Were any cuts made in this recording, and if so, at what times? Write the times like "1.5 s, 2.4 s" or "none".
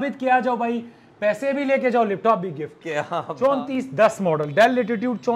3.2 s